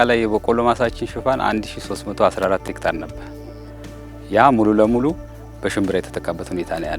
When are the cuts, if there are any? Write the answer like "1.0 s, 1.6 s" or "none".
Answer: none